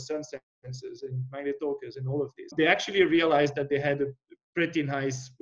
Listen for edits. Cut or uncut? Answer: cut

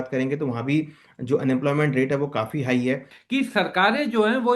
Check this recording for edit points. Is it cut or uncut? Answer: cut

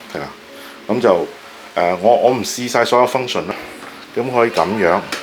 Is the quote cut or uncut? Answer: cut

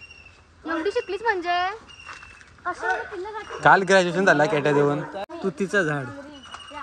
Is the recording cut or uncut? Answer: cut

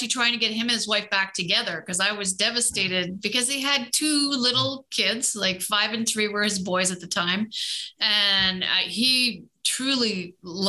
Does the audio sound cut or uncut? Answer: uncut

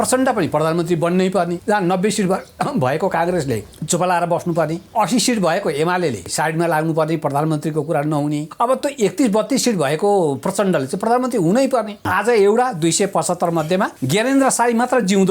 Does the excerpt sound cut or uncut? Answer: cut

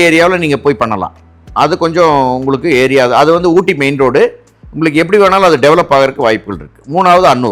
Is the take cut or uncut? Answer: uncut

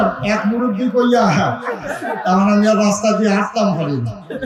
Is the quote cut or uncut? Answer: uncut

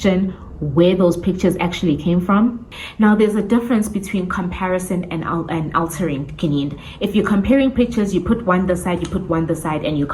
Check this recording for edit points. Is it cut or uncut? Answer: cut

